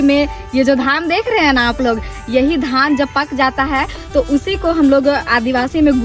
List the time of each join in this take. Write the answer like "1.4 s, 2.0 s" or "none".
none